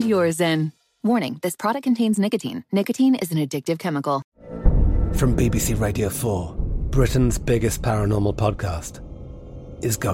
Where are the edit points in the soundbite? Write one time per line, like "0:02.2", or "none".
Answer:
0:04.3